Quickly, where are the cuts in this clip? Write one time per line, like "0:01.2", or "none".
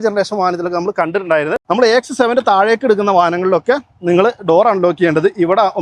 0:01.6